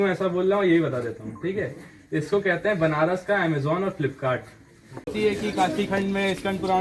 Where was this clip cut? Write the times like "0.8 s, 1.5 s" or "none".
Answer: 5.0 s